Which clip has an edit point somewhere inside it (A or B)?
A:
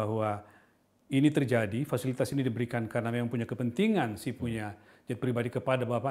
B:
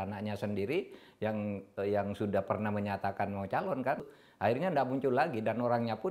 B